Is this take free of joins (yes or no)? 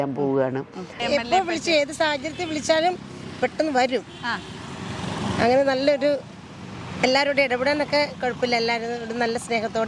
no